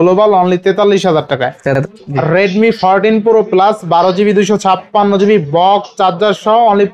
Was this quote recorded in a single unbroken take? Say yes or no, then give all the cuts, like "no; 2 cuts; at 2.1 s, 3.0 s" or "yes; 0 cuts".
no; 1 cut; at 1.8 s